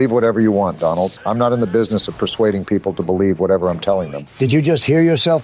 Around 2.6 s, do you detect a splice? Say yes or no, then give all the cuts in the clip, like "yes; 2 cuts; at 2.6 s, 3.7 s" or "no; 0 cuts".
no; 2 cuts; at 1.2 s, 4.2 s